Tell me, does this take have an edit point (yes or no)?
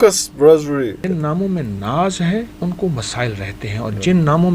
yes